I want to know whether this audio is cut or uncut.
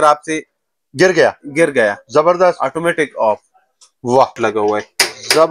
cut